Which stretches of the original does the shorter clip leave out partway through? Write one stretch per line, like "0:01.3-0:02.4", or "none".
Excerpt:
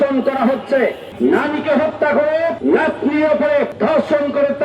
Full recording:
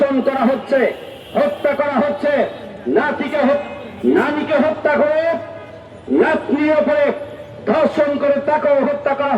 0:01.0-0:03.9
0:05.4-0:06.0
0:07.2-0:07.6